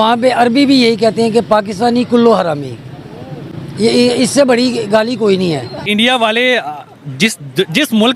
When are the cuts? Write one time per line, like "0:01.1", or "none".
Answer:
0:05.9